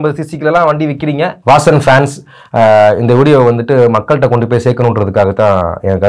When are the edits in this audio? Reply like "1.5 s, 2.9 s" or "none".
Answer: 1.4 s